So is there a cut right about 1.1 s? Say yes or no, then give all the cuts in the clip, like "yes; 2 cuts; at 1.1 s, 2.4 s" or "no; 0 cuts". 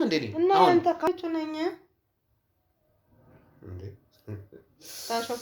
yes; 1 cut; at 1.1 s